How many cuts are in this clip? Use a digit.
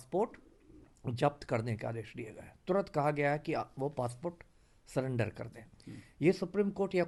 0